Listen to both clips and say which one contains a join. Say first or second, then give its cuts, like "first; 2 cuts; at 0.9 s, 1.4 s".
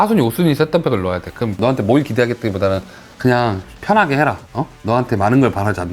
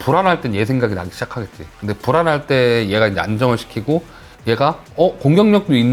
first; 1 cut; at 1.6 s